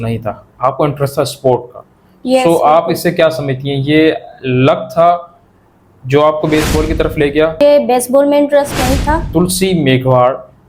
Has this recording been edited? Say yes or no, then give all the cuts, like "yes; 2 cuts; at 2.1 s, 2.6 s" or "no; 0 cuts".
yes; 2 cuts; at 7.6 s, 9.2 s